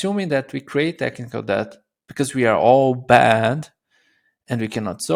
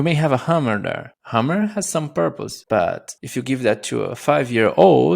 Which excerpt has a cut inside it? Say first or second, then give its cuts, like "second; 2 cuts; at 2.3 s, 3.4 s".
second; 3 cuts; at 1.1 s, 2.5 s, 3.1 s